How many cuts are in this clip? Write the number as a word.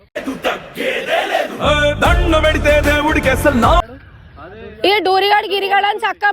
one